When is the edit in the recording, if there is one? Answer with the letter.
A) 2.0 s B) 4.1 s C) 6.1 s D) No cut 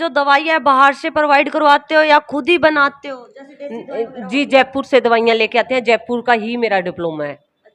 D